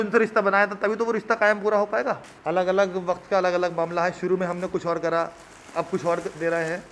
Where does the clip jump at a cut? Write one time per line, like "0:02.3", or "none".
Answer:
0:02.3

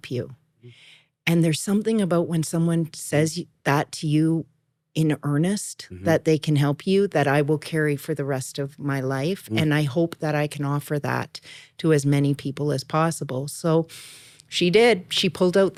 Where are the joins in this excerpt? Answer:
none

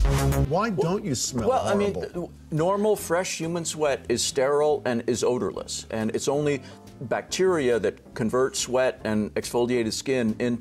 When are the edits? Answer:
none

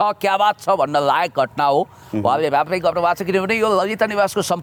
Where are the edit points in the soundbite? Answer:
none

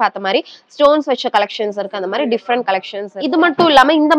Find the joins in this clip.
0:03.0

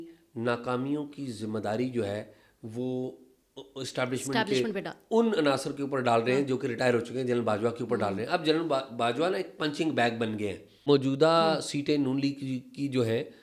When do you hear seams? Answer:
0:10.8

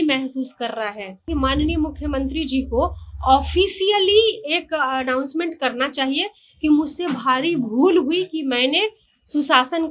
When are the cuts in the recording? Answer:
0:01.3

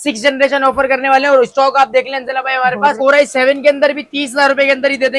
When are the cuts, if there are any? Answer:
0:03.0

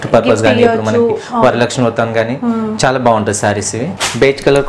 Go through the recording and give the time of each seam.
0:03.8

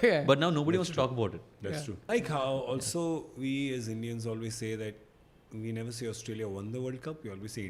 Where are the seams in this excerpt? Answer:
0:02.0

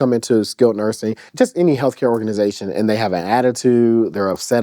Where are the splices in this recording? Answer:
0:01.2

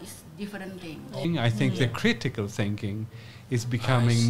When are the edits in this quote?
0:01.2

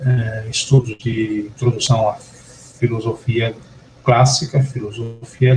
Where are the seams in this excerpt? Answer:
0:02.6

